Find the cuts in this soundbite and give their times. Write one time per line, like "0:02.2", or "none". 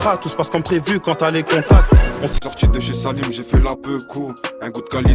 0:02.3

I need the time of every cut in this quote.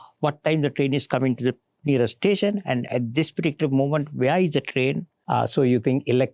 0:02.9
0:05.2

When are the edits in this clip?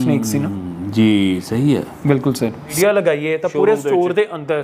0:02.7

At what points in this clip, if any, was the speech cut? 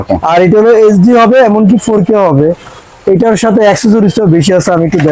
none

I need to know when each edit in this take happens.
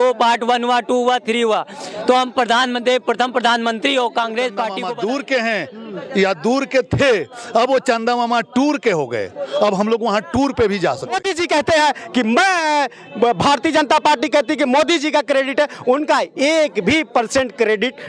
0:04.8
0:11.2

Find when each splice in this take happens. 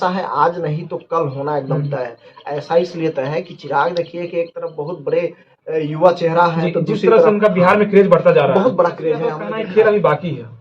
0:09.5

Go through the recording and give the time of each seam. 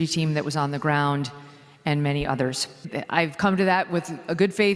0:02.8

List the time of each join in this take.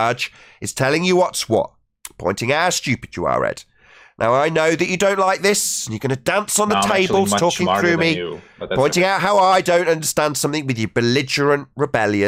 none

